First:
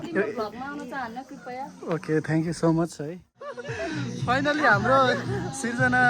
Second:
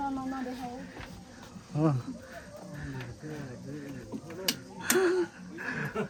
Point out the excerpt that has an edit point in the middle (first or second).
first